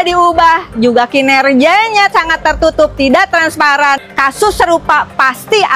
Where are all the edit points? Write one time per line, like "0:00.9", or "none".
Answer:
0:04.1

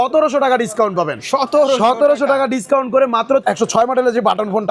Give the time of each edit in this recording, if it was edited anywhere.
0:03.4

